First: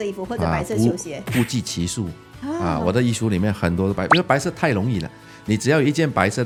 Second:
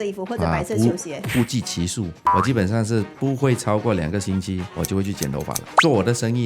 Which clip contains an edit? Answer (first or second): second